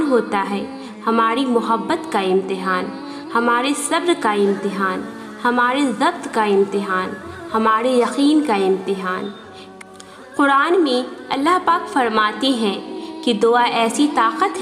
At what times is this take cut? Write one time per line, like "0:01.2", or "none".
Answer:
0:09.8